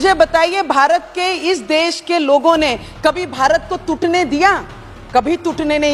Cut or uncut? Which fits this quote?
uncut